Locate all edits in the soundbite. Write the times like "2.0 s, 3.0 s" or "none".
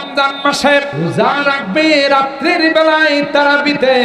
0.9 s